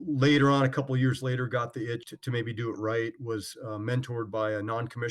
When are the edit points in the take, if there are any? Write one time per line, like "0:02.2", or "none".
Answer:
0:02.1